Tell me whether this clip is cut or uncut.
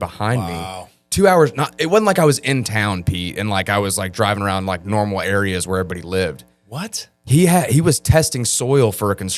uncut